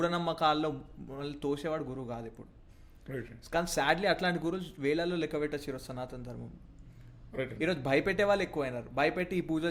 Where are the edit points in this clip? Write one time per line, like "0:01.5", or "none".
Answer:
none